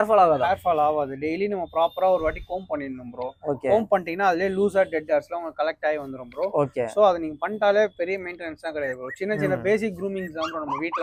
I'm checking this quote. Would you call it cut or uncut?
uncut